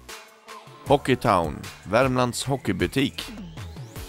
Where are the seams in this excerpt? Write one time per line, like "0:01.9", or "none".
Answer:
0:03.2

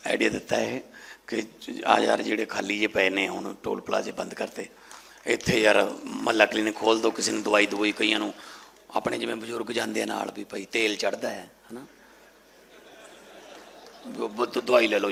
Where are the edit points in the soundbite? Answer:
none

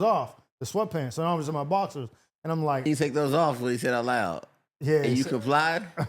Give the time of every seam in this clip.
0:02.9

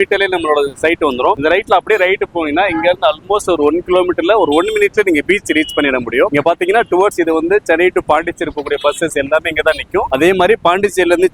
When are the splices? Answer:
none

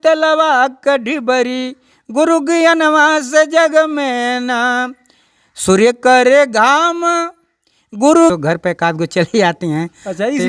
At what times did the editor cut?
0:08.3

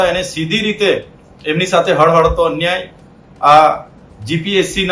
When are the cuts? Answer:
none

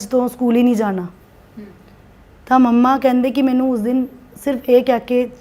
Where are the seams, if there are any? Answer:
none

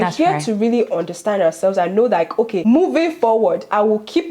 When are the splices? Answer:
0:02.5

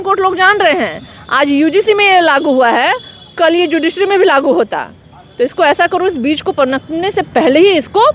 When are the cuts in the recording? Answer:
none

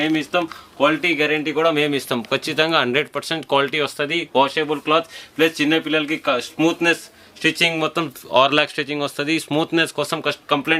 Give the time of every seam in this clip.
none

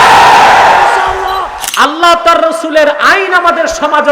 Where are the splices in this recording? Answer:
0:01.6

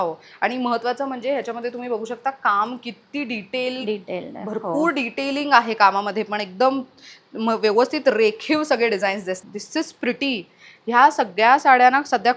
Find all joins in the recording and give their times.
0:09.4

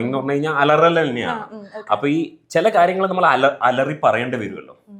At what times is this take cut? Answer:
none

